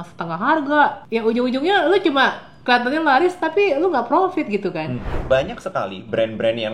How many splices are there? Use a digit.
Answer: 2